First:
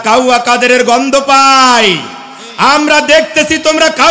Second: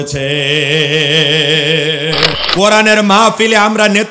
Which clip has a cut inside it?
second; 1 cut; at 2.4 s

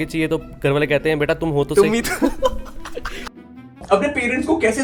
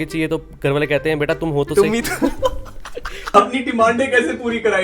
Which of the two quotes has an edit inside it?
second; 1 cut; at 3.2 s

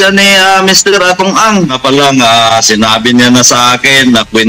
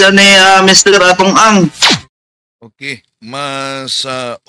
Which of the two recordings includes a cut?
first; 1 cut; at 1.6 s

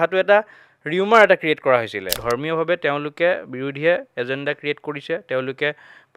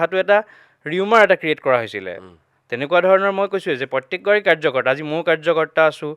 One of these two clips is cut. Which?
first; 1 cut; at 2.1 s

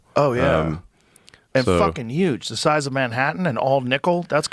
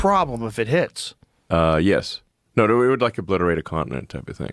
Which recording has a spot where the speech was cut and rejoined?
second; 1 cut; at 2.3 s

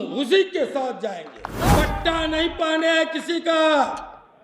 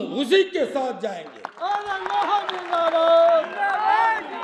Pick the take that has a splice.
first; 1 cut; at 1.8 s

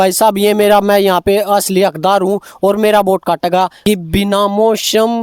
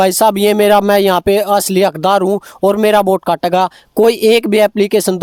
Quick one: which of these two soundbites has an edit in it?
first; 1 cut; at 3.8 s

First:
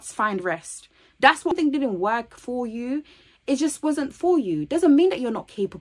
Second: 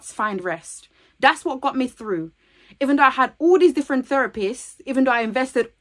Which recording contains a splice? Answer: first; 1 cut; at 1.5 s

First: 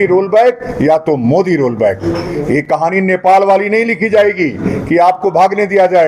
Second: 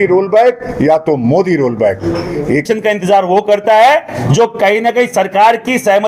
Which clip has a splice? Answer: second; 1 cut; at 2.7 s

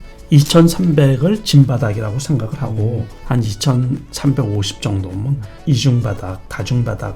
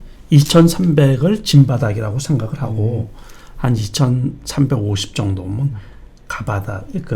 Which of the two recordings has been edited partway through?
first; 2 cuts; at 3.1 s, 5.5 s

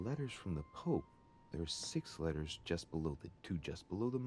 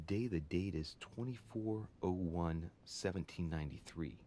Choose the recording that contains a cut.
first; 1 cut; at 3.2 s

